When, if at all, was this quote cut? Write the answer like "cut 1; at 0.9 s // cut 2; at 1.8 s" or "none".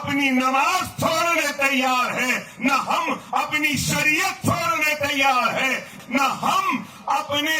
cut 1; at 5.9 s